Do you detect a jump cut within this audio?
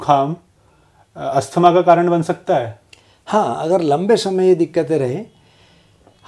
no; 0 cuts

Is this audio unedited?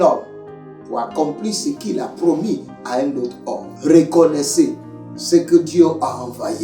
no; 1 cut; at 3.7 s

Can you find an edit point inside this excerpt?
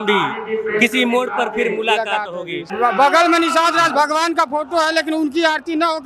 yes; 1 cut; at 2.7 s

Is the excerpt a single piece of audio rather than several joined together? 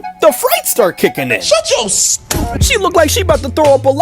no; 1 cut; at 2.6 s

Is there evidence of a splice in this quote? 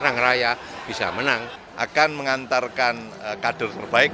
yes; 1 cut; at 1.6 s

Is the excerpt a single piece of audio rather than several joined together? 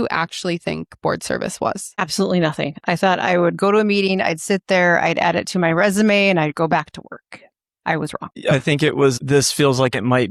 no; 2 cuts; at 8.4 s, 9.2 s

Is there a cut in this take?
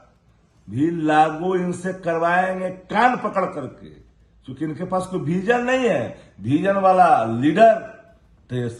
no; 0 cuts

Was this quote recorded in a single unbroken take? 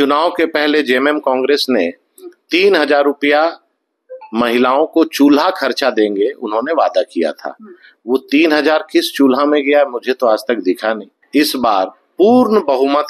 no; 1 cut; at 11.2 s

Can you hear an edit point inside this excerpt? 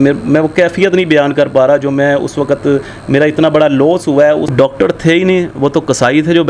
yes; 1 cut; at 4.5 s

